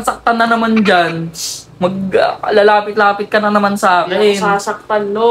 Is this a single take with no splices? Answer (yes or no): yes